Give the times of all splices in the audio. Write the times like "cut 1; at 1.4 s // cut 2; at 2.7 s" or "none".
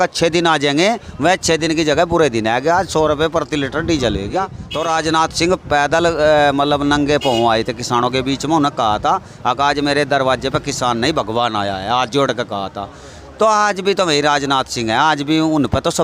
cut 1; at 4.6 s